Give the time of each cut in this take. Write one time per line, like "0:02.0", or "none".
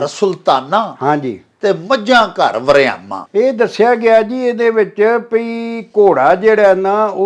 none